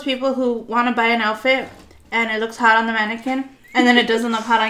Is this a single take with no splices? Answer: yes; 0 cuts

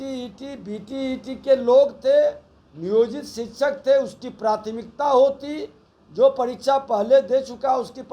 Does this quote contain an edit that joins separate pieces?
no; 0 cuts

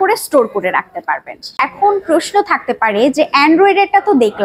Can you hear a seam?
yes; 1 cut; at 1.6 s

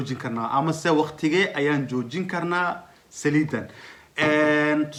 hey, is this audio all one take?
yes; 0 cuts

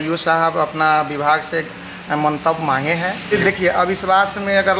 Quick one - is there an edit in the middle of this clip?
yes; 1 cut; at 3.3 s

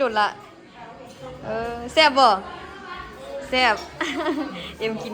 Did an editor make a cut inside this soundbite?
no; 0 cuts

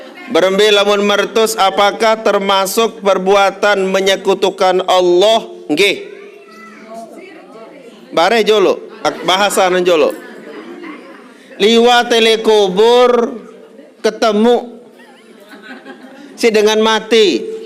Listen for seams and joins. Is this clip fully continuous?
yes; 0 cuts

